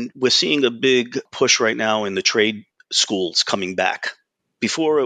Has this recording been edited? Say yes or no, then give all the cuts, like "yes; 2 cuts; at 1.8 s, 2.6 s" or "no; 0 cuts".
yes; 1 cut; at 1.3 s